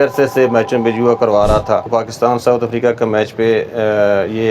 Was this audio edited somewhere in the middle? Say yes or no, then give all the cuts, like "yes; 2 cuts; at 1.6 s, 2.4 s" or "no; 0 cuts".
yes; 1 cut; at 1.9 s